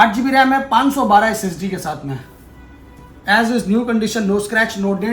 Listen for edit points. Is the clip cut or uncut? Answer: uncut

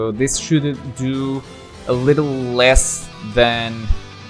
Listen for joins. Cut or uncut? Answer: uncut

